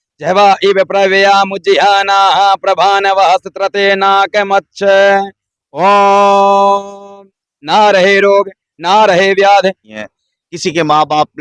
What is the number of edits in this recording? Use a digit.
1